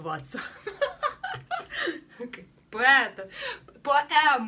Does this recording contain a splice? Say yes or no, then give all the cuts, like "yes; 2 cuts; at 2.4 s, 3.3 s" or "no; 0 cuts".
no; 0 cuts